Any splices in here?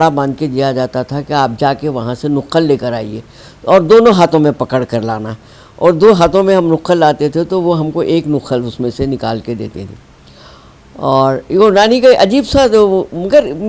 no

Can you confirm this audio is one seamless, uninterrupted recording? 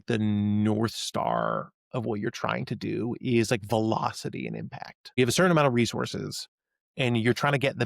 no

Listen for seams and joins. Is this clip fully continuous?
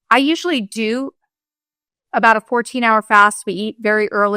yes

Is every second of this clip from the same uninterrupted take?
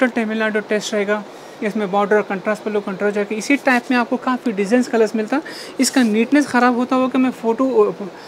yes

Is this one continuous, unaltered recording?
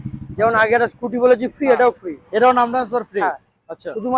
yes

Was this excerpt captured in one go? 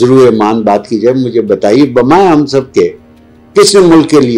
yes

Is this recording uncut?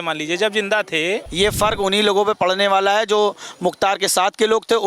no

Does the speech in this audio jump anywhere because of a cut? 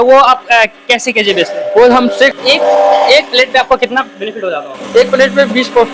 yes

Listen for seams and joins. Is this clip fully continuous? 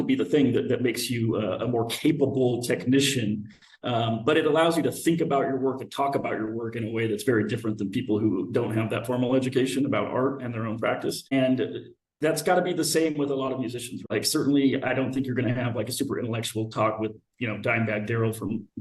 no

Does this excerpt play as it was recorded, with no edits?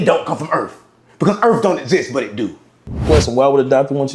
no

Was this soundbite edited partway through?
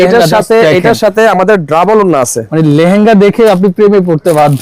no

